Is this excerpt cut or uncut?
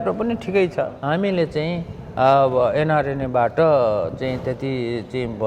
cut